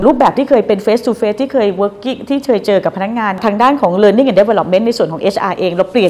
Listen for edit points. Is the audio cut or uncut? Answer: uncut